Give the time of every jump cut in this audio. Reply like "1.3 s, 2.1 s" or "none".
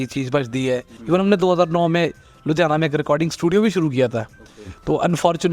0.9 s